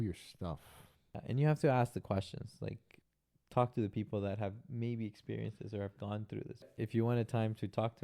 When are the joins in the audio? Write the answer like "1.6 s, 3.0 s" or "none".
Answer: 1.2 s, 2.9 s, 6.7 s